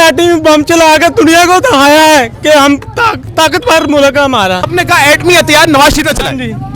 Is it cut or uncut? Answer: cut